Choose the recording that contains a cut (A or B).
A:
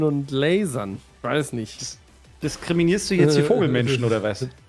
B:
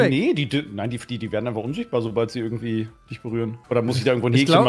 B